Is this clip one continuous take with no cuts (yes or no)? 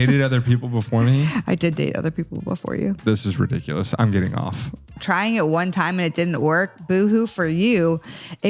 no